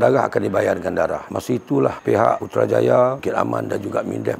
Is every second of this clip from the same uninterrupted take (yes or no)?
no